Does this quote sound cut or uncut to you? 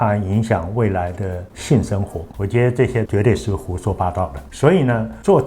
cut